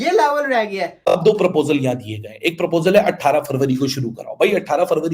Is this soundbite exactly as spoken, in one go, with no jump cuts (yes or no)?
no